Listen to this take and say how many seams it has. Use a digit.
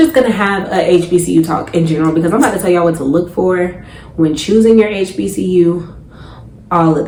0